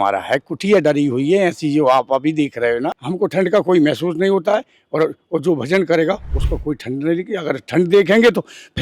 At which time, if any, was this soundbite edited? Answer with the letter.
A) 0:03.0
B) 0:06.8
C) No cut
A